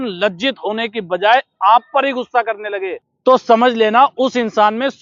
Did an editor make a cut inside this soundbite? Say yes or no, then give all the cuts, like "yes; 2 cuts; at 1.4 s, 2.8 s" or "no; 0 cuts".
yes; 1 cut; at 3.0 s